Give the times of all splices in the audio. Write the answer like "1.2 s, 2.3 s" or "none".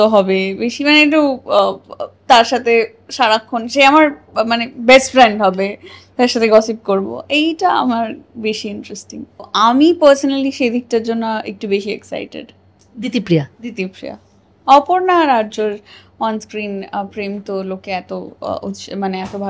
9.5 s